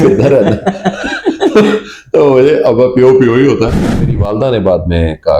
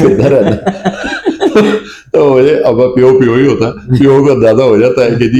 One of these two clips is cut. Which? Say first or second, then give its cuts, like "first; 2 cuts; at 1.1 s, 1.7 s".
first; 1 cut; at 4.0 s